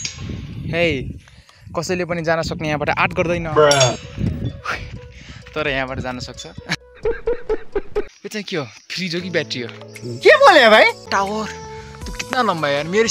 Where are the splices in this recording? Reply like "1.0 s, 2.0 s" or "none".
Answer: 8.2 s, 11.1 s